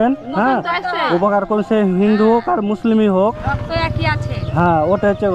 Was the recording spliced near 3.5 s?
yes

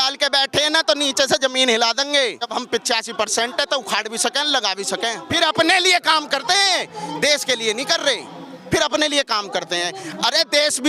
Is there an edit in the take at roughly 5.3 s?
yes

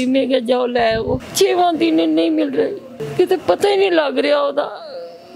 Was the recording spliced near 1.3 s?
yes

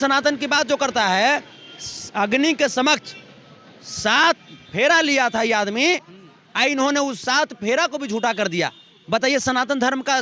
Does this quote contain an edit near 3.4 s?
no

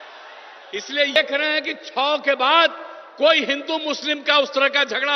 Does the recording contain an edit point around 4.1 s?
no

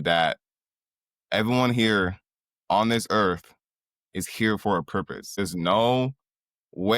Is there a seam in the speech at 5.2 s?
yes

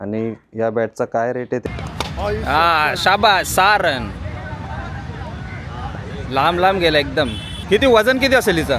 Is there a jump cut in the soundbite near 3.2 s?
no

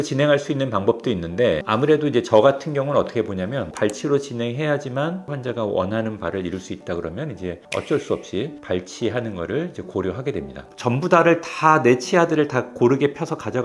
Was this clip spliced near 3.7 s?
yes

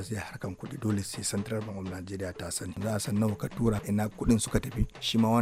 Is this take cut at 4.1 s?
no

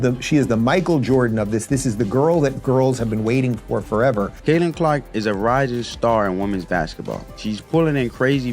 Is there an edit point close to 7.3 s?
yes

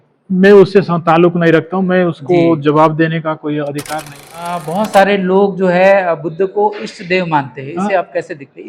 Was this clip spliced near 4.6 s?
yes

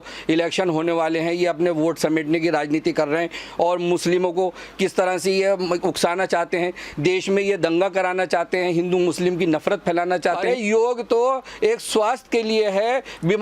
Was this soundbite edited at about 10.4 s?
yes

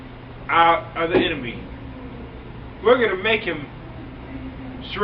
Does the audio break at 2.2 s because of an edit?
no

